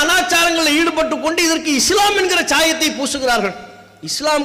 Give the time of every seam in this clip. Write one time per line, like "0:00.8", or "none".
none